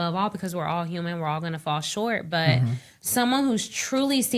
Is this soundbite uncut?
yes; 0 cuts

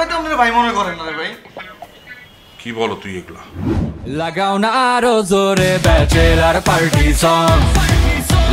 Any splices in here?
yes; 1 cut; at 3.9 s

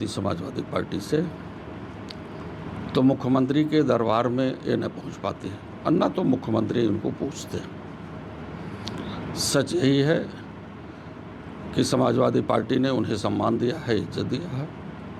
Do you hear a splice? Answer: no; 0 cuts

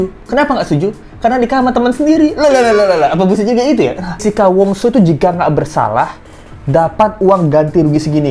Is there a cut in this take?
yes; 1 cut; at 4.2 s

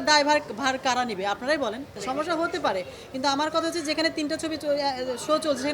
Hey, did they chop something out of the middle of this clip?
yes; 1 cut; at 2.0 s

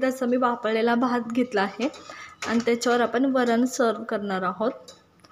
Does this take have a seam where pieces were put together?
no; 0 cuts

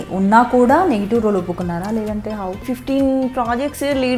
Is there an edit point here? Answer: yes; 1 cut; at 2.6 s

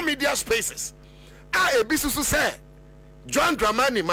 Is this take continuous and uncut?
yes; 0 cuts

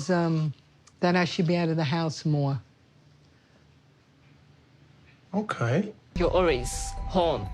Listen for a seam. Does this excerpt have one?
yes; 1 cut; at 6.0 s

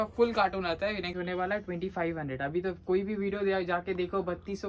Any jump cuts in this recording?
yes; 1 cut; at 1.2 s

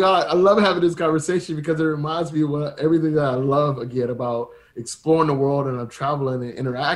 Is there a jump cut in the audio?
no; 0 cuts

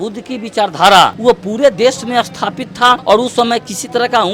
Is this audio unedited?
no; 2 cuts; at 1.2 s, 3.0 s

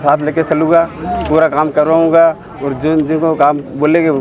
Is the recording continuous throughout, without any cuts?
yes; 0 cuts

